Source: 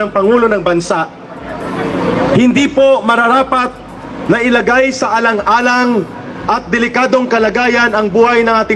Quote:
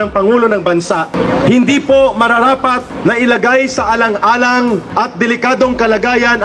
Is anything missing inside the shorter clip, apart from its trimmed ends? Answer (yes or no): yes